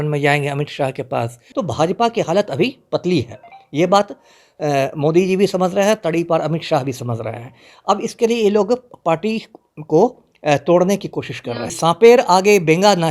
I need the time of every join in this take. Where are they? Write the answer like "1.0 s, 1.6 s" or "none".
1.4 s, 11.7 s